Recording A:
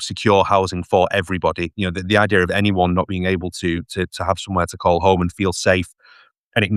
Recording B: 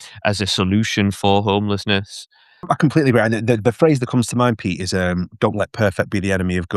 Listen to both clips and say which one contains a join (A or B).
B